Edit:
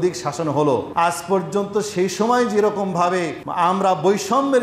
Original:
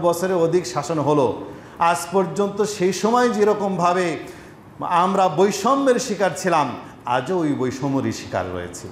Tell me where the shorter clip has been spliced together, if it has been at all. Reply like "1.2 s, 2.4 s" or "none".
0.9 s, 3.4 s